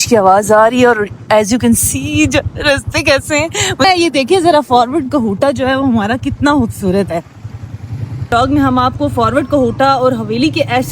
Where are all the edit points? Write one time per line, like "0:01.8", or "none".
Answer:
0:03.8
0:08.3